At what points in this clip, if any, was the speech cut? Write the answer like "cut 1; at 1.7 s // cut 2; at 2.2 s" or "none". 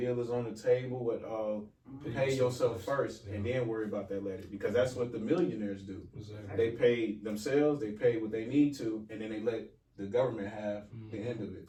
none